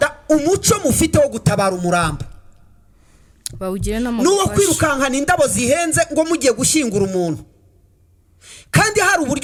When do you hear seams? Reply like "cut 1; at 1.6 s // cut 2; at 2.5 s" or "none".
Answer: none